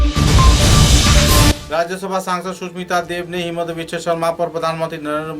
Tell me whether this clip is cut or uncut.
cut